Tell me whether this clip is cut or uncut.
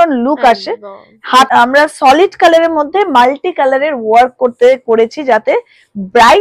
cut